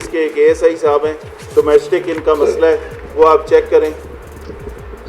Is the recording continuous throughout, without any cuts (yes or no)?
yes